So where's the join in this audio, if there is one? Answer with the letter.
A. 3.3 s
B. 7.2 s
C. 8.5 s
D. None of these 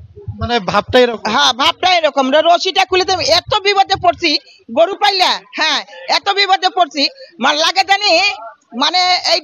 D